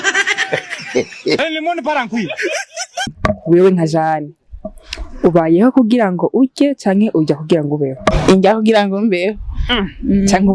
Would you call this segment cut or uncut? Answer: uncut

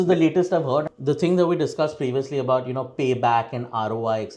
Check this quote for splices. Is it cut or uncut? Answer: cut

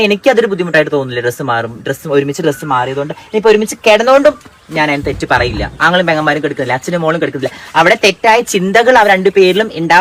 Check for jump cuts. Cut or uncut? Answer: uncut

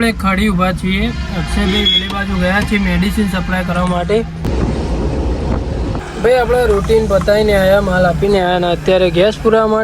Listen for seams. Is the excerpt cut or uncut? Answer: cut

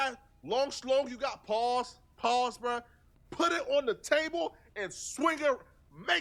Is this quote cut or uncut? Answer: uncut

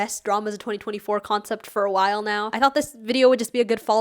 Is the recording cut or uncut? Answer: cut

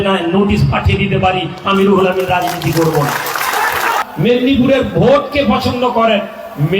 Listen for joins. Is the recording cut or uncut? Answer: cut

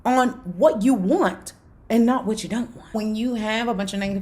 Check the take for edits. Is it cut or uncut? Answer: cut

